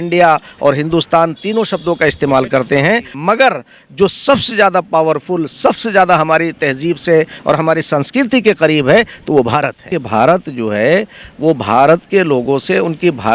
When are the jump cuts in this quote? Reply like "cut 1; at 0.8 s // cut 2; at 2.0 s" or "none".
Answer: cut 1; at 3.1 s // cut 2; at 9.9 s